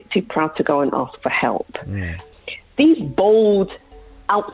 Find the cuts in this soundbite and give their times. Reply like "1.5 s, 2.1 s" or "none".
2.2 s